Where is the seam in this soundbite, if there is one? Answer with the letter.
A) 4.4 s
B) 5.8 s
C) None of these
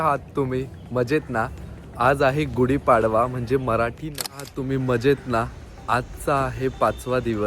A